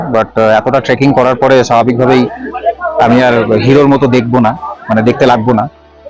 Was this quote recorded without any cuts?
yes; 0 cuts

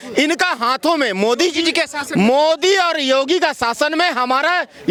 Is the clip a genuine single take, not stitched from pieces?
yes; 0 cuts

